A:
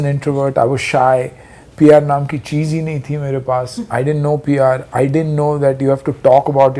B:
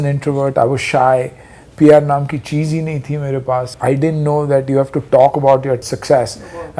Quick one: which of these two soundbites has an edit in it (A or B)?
B